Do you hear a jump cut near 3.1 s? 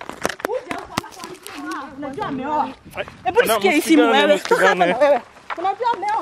no; 1 cut; at 1.9 s

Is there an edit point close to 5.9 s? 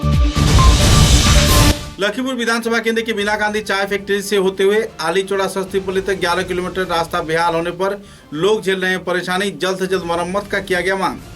no; 1 cut; at 1.8 s

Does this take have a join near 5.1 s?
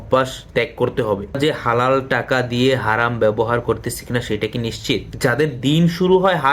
yes; 2 cuts; at 1.4 s, 5.1 s

